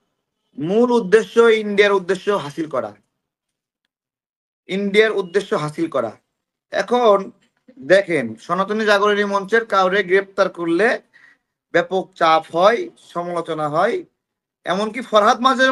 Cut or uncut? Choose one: uncut